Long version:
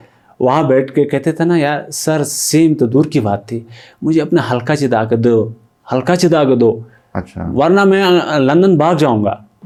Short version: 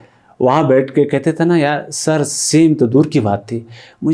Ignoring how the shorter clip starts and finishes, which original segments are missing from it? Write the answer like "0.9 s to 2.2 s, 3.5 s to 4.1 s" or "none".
none

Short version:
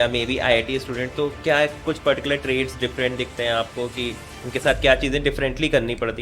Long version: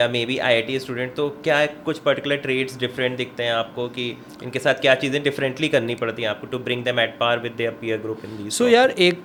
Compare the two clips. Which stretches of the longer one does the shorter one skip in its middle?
none

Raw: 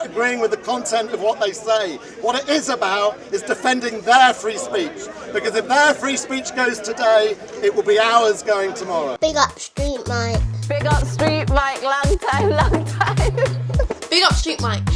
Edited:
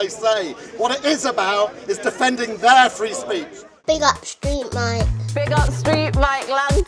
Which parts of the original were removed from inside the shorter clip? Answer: 5.2 s to 9.1 s

